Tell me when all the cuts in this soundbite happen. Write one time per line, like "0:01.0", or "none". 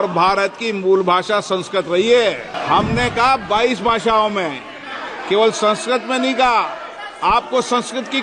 0:02.5

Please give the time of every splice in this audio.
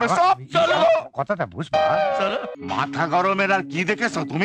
0:02.5

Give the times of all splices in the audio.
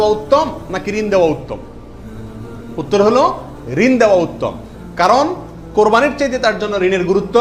none

